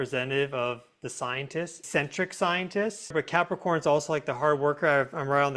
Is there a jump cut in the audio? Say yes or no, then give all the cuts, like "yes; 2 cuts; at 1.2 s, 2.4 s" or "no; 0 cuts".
yes; 2 cuts; at 1.8 s, 3.1 s